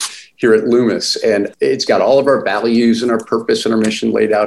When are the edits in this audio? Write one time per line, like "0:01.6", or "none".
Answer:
0:01.5